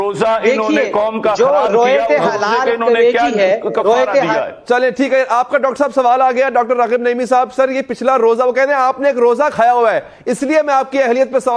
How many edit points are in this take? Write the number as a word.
zero